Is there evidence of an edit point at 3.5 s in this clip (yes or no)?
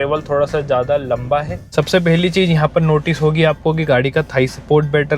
no